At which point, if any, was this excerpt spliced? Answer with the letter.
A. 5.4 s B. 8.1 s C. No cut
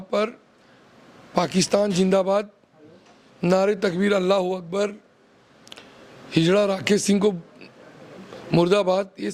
C